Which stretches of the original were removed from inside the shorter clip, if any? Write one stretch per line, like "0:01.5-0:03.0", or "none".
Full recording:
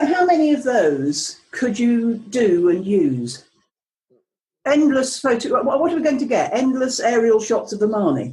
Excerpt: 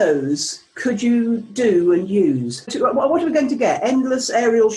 0:03.5-0:05.4